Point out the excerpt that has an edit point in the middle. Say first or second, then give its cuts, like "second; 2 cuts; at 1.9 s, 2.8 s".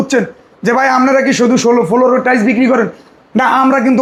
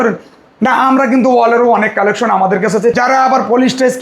second; 1 cut; at 2.9 s